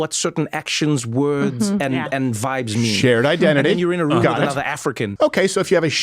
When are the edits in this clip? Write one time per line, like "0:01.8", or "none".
0:05.1